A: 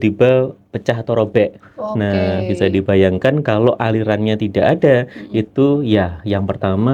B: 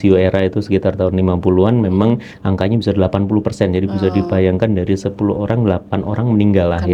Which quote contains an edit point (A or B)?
A